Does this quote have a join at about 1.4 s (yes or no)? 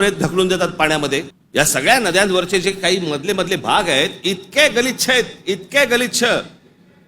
yes